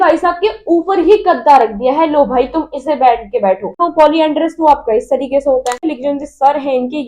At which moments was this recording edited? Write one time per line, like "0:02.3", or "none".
0:03.7
0:05.8